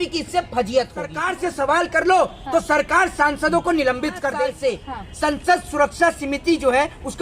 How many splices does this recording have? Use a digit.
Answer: 2